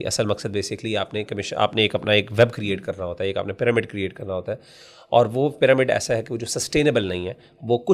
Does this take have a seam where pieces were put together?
no; 0 cuts

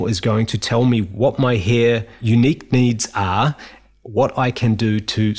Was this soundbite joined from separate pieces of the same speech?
yes; 2 cuts; at 1.1 s, 2.1 s

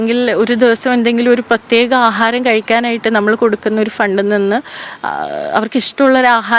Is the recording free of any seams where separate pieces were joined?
yes; 0 cuts

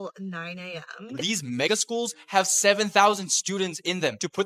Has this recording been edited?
yes; 1 cut; at 1.1 s

